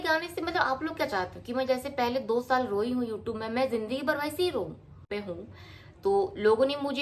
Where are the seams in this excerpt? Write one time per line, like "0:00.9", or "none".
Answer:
0:05.0